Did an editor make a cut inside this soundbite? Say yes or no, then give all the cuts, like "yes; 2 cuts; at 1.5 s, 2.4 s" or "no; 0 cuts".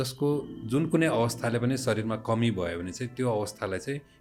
no; 0 cuts